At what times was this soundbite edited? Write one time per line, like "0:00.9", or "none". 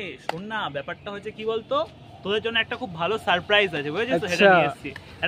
none